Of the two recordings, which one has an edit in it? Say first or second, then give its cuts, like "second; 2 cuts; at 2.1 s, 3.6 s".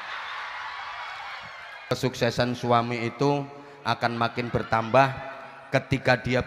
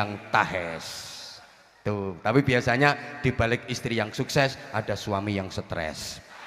first; 1 cut; at 1.7 s